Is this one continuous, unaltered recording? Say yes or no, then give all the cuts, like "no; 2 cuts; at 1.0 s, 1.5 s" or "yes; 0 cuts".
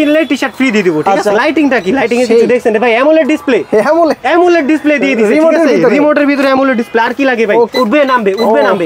no; 2 cuts; at 1.3 s, 7.7 s